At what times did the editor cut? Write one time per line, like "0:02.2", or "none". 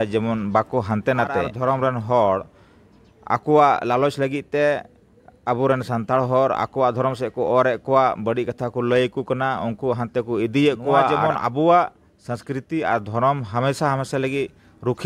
0:01.5
0:11.2